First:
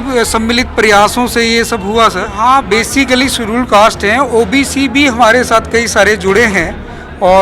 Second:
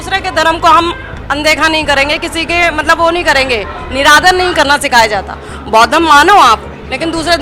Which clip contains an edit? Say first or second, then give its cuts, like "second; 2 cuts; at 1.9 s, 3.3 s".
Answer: first; 1 cut; at 2.3 s